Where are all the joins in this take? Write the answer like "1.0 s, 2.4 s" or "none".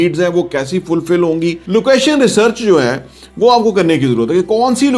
1.6 s

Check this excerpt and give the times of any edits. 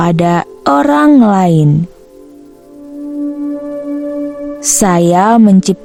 none

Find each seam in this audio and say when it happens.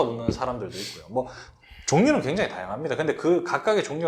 none

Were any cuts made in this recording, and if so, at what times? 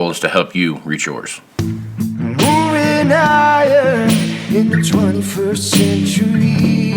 1.4 s

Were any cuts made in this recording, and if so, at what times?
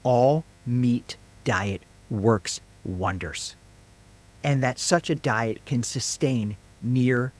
none

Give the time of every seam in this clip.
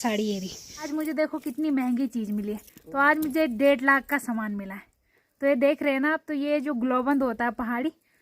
0.9 s

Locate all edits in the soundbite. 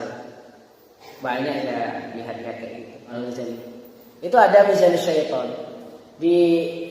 3.1 s

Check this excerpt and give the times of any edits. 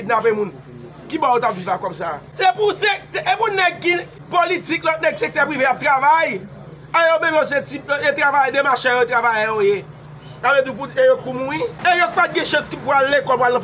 2.2 s, 4.2 s, 11.8 s

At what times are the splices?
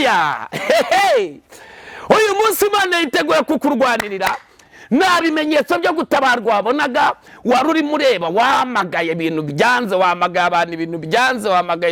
none

